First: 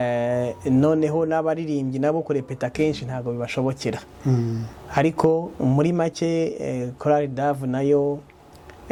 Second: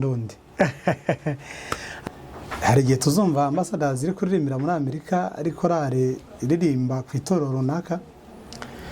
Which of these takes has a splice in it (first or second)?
second